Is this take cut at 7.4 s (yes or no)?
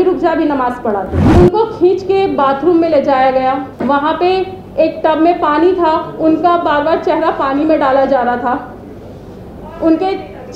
no